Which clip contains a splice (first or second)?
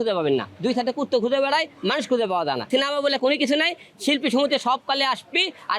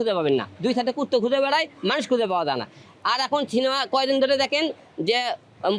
first